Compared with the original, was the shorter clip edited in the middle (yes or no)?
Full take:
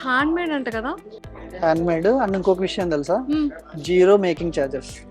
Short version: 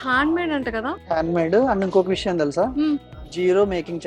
yes